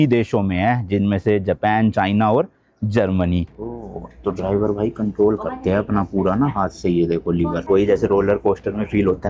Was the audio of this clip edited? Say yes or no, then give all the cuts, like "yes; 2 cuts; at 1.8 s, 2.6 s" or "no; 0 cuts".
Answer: yes; 2 cuts; at 3.8 s, 7.6 s